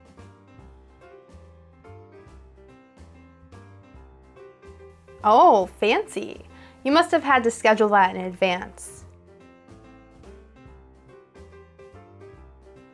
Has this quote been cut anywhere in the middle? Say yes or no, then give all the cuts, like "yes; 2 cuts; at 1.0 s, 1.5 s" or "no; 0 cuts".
no; 0 cuts